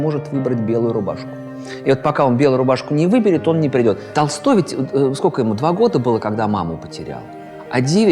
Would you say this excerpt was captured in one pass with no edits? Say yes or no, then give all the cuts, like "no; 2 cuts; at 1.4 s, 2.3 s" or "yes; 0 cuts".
no; 1 cut; at 4.1 s